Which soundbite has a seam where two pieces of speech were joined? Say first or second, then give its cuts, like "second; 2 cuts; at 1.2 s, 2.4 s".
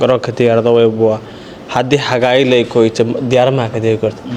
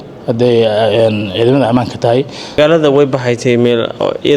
second; 1 cut; at 2.6 s